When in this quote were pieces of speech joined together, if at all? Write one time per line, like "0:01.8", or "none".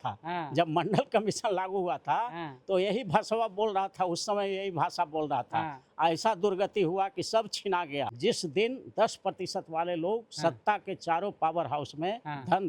0:08.1